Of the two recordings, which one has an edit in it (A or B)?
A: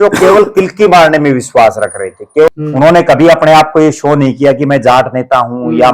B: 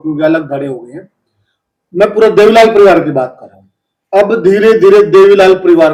A